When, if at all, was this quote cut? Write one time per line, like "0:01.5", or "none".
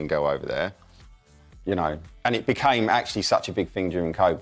0:01.0